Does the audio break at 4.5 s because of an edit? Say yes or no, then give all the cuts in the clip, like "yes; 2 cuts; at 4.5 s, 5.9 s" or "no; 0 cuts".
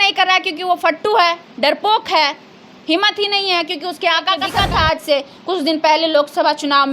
yes; 1 cut; at 4.5 s